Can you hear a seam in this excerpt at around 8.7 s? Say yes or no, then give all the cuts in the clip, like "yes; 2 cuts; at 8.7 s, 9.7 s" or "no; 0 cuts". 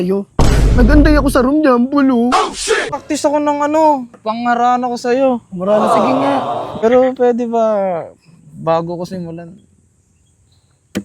no; 2 cuts; at 3.0 s, 6.7 s